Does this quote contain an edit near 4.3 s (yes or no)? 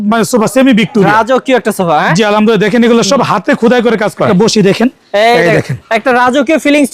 yes